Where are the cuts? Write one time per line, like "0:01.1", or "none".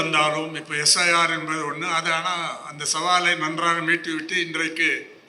none